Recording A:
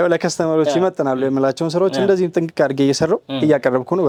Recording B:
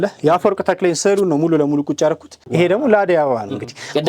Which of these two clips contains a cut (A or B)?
B